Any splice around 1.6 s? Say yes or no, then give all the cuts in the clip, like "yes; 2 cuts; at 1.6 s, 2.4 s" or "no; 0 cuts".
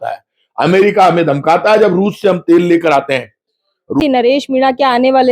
no; 1 cut; at 4.2 s